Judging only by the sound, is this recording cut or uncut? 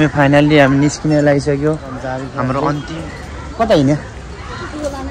cut